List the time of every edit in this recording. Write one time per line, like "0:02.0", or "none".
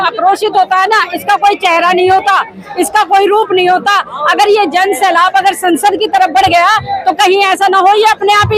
none